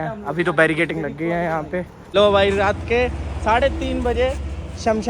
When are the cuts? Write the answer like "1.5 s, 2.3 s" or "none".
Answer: 2.0 s